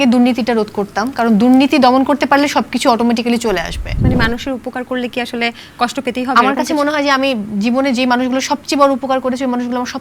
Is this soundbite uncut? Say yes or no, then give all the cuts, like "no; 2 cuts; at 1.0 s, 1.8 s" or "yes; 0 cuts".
no; 1 cut; at 3.8 s